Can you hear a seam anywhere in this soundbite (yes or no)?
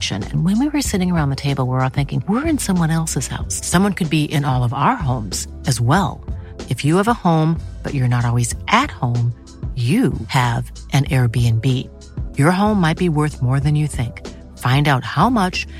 no